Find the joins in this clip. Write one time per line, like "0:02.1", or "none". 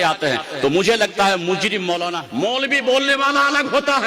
0:02.2